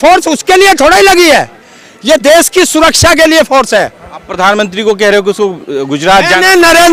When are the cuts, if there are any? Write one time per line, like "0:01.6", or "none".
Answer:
none